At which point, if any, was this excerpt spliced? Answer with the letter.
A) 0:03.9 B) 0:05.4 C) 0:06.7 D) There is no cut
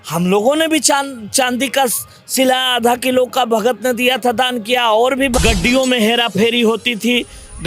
B